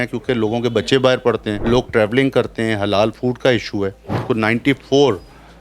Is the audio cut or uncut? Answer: cut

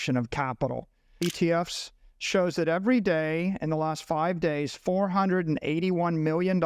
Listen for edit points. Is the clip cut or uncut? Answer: cut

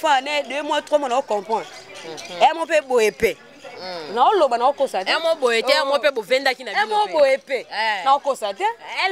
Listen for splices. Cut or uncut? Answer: uncut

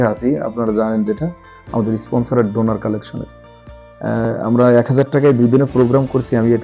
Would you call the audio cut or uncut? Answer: uncut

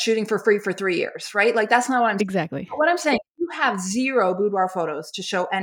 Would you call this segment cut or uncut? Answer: uncut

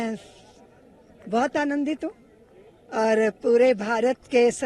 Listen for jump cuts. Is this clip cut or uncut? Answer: uncut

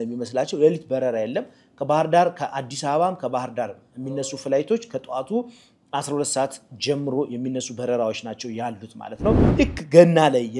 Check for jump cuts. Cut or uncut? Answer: cut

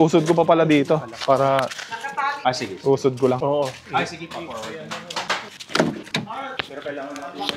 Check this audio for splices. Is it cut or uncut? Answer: uncut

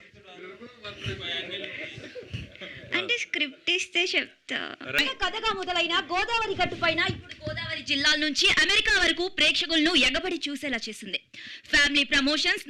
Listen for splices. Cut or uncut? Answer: cut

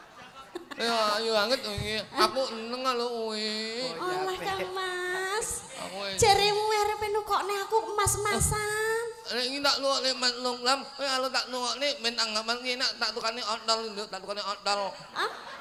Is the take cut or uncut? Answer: uncut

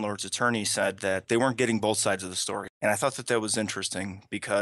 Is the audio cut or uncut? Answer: cut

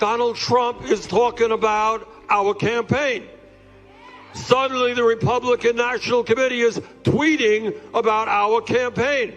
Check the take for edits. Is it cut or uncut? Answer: cut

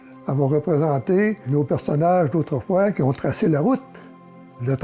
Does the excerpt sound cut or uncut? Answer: uncut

